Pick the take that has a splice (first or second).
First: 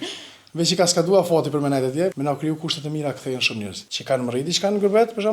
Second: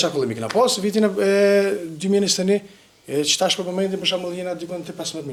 first